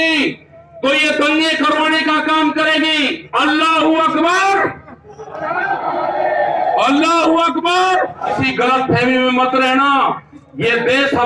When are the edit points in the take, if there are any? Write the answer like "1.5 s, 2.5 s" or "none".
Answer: 3.2 s, 8.3 s